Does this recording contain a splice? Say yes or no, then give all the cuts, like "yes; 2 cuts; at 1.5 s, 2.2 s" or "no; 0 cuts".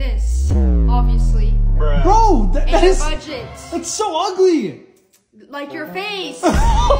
no; 0 cuts